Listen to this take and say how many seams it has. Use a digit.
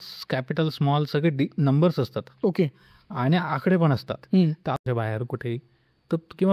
1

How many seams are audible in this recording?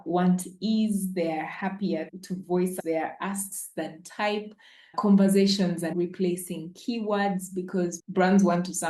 1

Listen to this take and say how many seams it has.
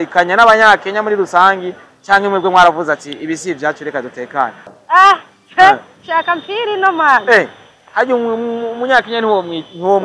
1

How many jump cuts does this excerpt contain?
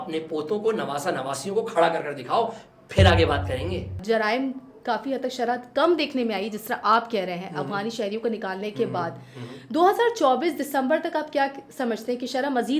1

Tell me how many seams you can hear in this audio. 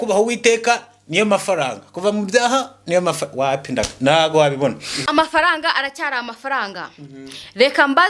1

